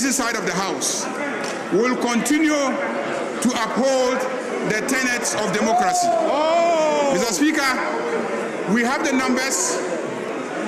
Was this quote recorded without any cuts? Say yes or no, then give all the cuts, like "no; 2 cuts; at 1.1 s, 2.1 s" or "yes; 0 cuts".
yes; 0 cuts